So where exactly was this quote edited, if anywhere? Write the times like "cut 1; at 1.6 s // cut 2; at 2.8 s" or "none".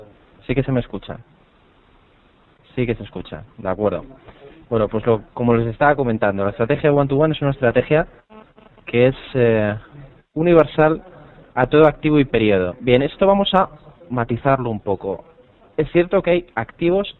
cut 1; at 1.4 s